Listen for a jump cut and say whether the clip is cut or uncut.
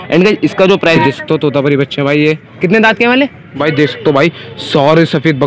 cut